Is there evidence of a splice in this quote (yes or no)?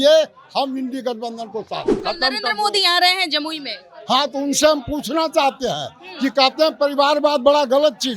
yes